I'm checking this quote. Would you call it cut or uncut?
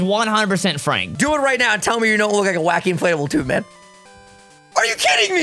cut